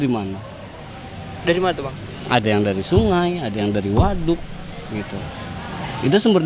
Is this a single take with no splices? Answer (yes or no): yes